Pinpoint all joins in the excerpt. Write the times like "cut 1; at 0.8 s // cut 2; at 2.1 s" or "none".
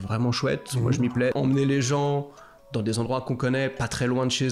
cut 1; at 1.3 s